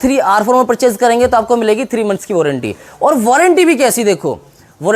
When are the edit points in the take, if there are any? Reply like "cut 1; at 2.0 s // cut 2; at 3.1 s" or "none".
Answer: none